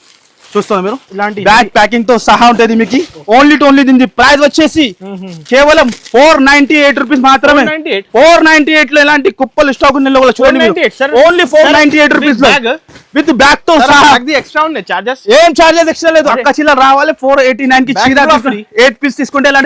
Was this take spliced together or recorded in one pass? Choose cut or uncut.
uncut